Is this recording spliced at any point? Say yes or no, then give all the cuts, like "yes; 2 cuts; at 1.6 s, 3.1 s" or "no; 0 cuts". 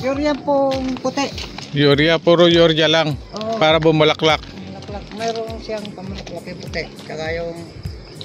no; 0 cuts